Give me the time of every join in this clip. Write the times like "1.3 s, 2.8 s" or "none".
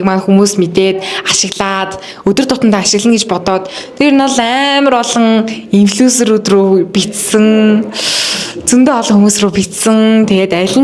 none